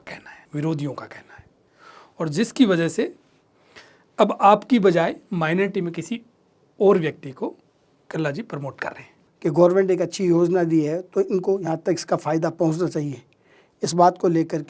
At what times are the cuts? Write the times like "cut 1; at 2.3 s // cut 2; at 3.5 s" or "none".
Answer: cut 1; at 9.2 s